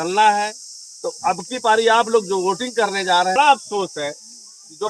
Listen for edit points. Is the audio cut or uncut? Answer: cut